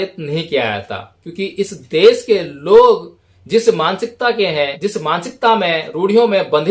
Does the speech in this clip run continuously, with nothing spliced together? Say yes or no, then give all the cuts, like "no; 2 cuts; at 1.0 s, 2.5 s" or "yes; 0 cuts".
no; 1 cut; at 4.7 s